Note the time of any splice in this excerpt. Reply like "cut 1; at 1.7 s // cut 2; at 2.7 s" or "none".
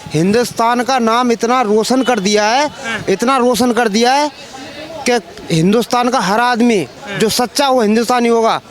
none